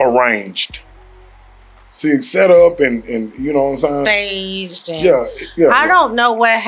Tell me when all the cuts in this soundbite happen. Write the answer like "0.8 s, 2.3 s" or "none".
none